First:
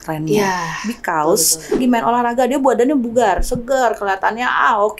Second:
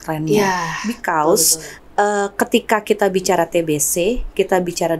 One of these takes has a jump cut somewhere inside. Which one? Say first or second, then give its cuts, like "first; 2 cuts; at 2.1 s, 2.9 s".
first; 1 cut; at 1.8 s